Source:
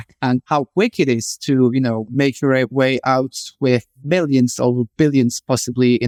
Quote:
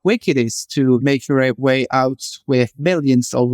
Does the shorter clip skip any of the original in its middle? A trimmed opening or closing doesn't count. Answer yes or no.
yes